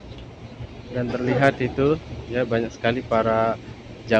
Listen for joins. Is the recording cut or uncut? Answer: uncut